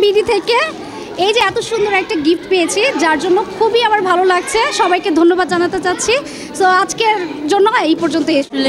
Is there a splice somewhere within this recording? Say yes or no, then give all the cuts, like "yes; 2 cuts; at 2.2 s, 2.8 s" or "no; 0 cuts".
no; 0 cuts